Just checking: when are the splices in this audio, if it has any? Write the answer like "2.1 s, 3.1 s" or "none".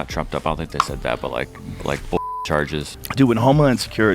3.0 s